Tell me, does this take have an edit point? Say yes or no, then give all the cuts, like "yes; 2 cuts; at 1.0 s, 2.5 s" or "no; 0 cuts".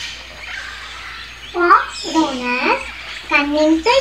yes; 1 cut; at 1.4 s